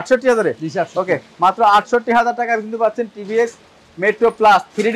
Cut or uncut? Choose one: uncut